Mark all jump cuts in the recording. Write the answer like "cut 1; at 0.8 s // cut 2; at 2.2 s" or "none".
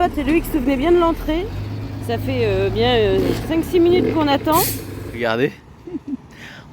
cut 1; at 5.1 s

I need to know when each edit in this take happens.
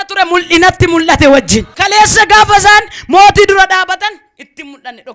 cut 1; at 1.7 s

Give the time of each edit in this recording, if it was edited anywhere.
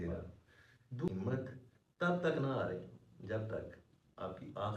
cut 1; at 1.1 s

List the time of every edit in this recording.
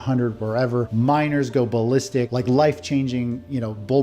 cut 1; at 0.9 s // cut 2; at 2.3 s

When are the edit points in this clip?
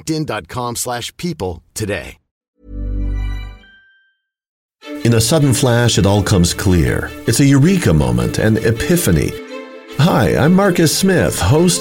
cut 1; at 2.4 s // cut 2; at 4.6 s

